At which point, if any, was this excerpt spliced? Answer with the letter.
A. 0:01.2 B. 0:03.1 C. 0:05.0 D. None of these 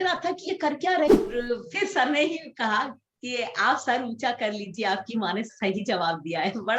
A